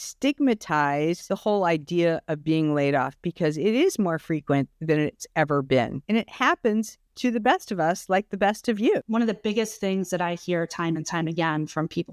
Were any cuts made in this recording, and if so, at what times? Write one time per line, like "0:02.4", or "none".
0:01.2
0:06.0
0:09.1